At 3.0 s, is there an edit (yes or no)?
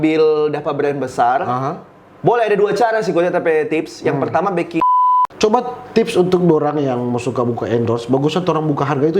no